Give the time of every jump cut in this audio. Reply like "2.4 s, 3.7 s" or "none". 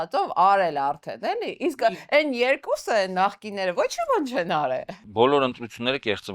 5.0 s